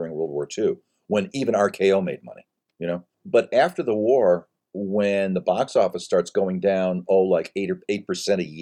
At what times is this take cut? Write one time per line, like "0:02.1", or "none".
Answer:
0:03.2